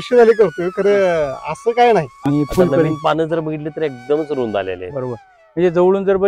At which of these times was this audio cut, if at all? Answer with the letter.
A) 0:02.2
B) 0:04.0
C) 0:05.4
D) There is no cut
A